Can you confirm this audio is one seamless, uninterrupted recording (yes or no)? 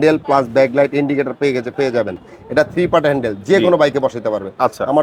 yes